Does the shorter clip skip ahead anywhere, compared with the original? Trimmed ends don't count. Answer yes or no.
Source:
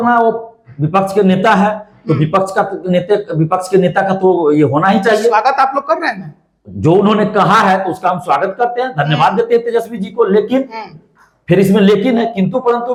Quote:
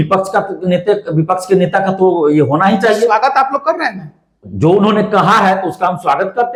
no